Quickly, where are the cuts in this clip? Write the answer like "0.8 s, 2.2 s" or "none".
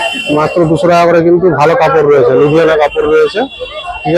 none